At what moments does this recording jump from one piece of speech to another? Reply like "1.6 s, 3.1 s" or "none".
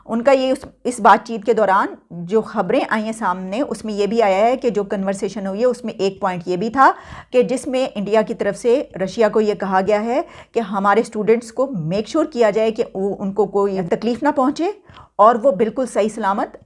none